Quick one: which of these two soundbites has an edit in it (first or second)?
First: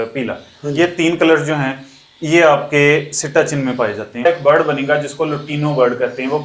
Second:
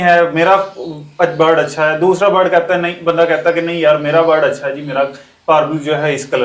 first